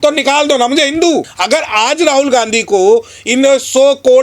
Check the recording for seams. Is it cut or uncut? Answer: cut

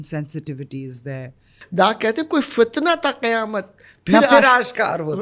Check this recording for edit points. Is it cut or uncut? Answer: cut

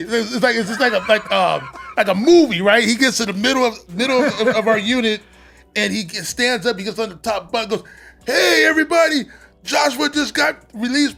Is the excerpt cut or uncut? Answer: uncut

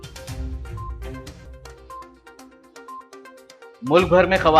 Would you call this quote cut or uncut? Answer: uncut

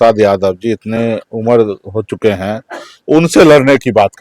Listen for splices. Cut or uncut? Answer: uncut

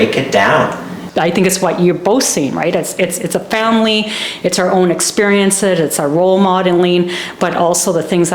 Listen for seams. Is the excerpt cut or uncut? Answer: cut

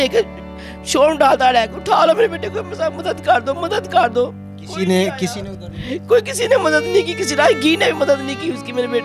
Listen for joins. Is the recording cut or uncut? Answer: uncut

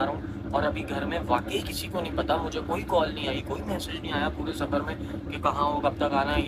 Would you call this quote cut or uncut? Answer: uncut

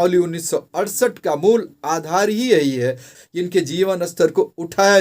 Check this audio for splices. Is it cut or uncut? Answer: cut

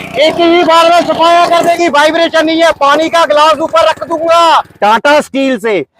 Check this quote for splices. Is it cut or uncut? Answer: cut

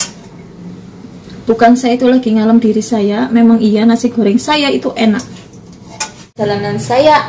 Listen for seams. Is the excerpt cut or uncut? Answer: cut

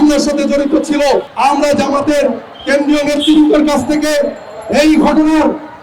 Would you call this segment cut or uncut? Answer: cut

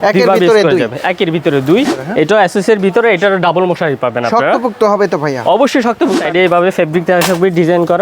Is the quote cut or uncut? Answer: cut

